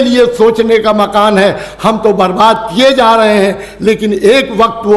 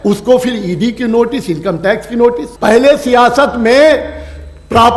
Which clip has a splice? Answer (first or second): second